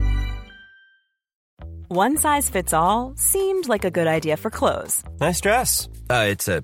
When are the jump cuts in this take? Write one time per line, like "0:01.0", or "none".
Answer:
0:01.3